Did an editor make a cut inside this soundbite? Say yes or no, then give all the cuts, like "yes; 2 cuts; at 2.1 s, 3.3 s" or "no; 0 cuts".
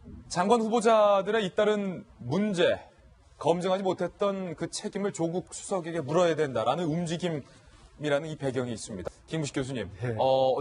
no; 0 cuts